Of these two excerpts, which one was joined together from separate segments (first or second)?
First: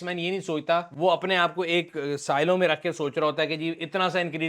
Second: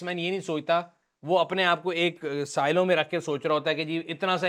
first